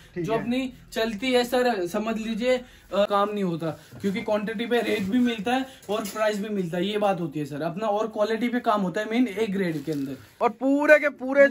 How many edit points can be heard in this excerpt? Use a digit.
2